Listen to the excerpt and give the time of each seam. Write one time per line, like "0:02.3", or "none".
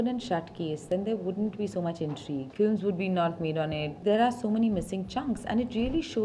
0:02.5
0:03.9